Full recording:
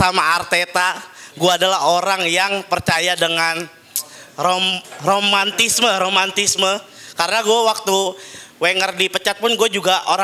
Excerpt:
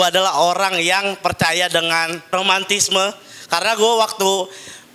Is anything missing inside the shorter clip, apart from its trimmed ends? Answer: yes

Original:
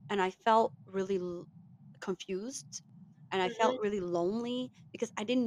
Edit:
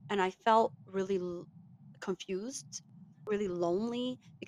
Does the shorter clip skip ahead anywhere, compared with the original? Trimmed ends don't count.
yes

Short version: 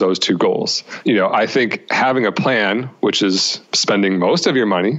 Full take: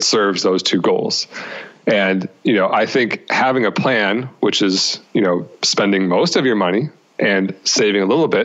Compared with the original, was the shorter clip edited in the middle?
yes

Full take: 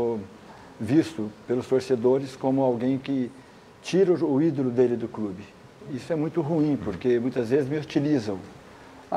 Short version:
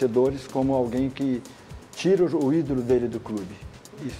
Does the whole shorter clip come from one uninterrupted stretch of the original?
yes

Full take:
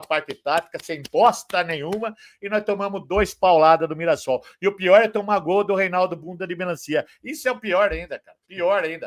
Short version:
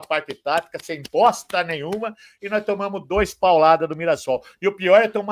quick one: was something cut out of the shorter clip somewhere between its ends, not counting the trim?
no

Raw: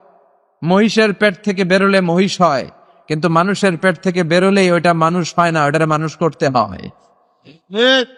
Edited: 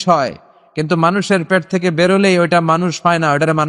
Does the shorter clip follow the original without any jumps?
yes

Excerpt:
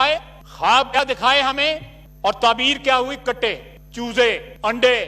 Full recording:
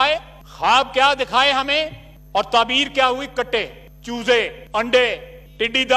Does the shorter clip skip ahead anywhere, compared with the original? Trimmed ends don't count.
yes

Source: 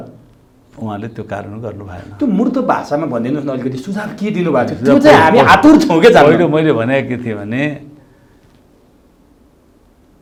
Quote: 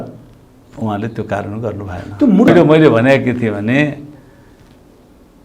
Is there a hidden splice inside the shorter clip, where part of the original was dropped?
yes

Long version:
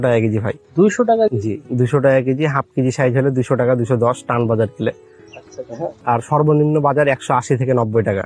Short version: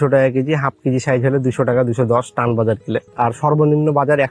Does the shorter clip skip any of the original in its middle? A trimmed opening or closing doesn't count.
yes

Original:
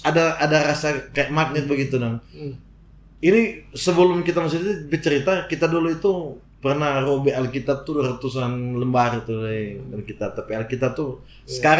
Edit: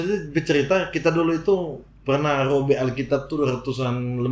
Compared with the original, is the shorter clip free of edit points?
yes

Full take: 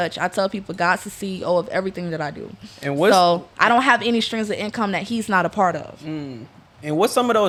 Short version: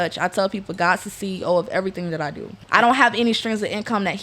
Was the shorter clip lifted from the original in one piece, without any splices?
no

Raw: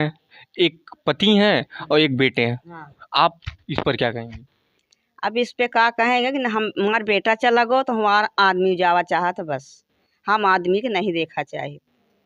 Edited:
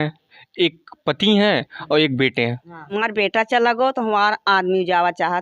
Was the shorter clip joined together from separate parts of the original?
yes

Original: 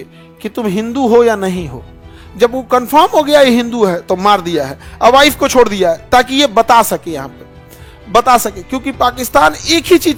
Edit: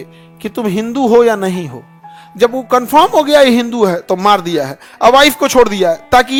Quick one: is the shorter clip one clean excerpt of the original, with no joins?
yes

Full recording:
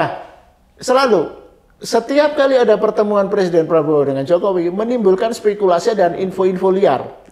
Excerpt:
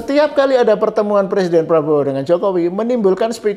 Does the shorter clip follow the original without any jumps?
yes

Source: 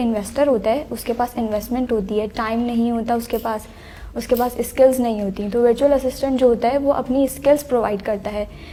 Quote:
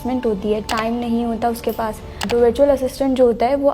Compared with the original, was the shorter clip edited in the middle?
yes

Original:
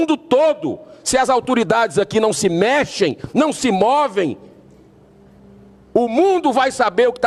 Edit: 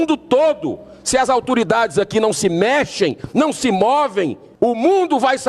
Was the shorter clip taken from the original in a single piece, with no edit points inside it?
no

